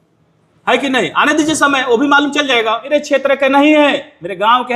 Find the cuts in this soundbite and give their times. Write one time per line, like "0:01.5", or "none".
0:02.9